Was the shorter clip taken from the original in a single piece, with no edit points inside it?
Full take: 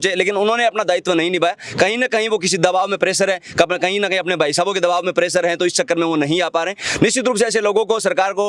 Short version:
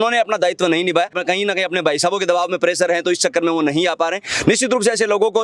no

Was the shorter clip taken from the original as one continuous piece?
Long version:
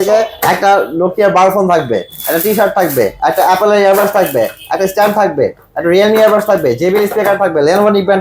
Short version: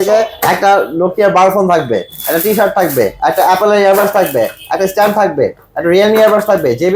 yes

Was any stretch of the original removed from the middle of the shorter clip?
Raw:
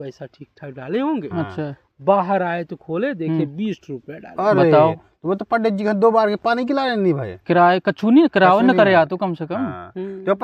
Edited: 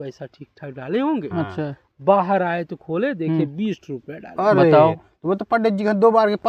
no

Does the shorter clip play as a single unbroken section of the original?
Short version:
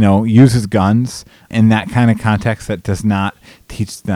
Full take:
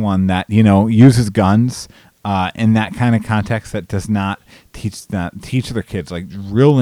no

